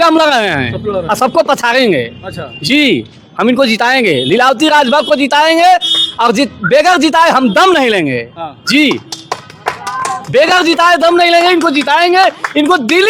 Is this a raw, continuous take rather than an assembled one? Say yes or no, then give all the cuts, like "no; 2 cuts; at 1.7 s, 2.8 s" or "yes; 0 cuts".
yes; 0 cuts